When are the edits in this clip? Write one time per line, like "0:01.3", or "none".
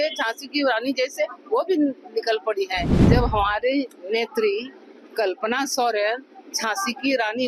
0:03.0